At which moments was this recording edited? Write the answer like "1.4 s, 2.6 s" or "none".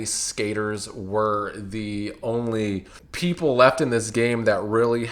3.0 s